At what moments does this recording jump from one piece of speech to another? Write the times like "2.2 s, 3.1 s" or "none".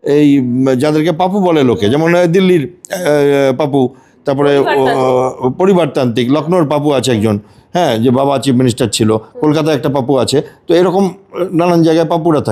none